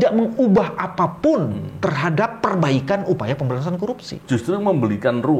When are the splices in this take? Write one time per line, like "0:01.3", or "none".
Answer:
0:04.1

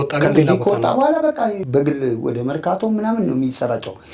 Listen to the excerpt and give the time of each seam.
0:01.6

